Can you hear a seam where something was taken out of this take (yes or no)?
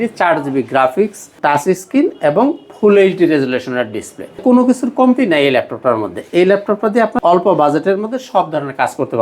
yes